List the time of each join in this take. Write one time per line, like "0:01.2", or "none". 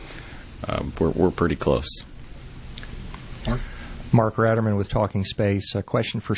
none

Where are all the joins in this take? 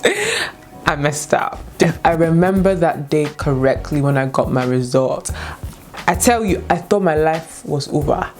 0:01.5

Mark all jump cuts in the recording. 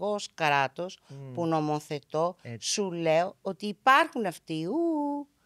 none

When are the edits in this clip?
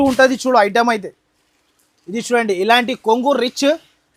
none

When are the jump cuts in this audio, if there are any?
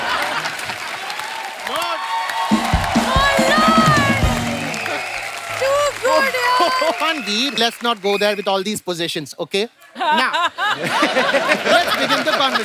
none

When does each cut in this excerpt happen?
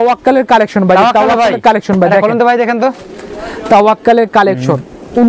none

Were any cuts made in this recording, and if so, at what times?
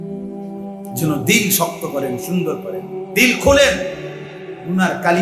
0:01.0

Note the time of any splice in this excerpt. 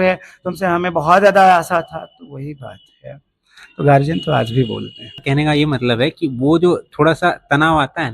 0:05.2

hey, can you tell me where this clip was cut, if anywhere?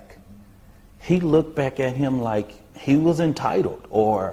none

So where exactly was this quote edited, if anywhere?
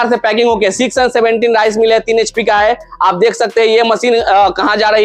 none

